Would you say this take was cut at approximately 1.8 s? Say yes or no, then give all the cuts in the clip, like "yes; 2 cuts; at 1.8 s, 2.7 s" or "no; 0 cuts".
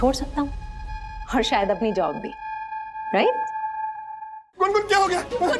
no; 1 cut; at 4.5 s